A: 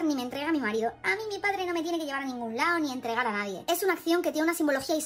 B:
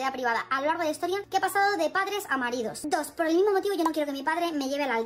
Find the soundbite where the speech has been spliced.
B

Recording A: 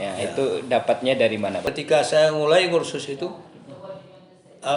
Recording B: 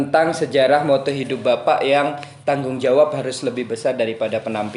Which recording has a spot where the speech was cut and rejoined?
A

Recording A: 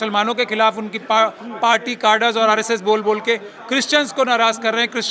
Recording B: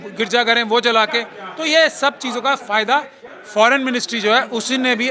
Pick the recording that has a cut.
B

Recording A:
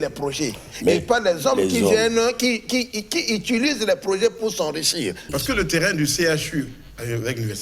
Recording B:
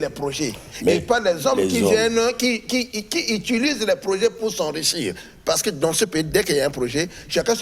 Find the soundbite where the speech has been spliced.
A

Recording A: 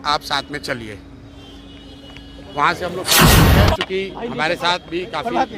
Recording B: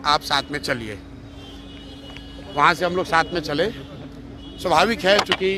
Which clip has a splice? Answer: A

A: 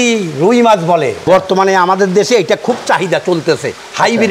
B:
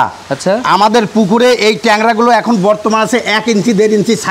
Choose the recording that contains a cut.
A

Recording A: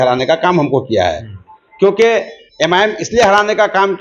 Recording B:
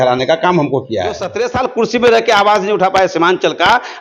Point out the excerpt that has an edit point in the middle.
B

